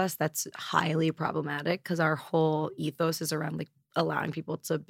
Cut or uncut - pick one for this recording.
cut